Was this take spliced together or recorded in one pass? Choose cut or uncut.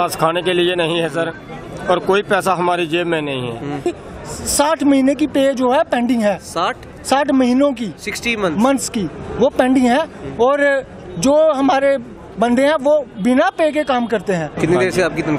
cut